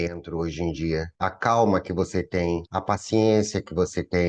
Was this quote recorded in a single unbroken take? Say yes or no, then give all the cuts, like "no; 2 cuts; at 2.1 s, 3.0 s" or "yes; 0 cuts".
yes; 0 cuts